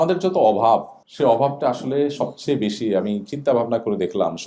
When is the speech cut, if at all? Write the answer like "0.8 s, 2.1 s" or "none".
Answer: 1.0 s